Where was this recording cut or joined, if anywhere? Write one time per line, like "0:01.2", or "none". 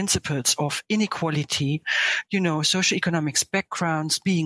0:02.0